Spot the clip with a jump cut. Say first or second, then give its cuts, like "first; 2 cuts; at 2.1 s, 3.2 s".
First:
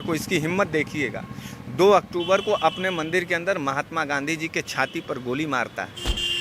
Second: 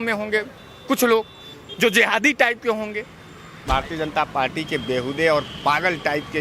second; 1 cut; at 3.7 s